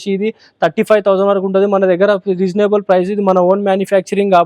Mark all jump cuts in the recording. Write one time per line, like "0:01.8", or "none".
none